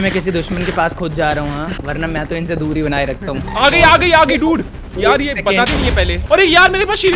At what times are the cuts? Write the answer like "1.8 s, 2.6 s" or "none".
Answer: 3.5 s, 6.2 s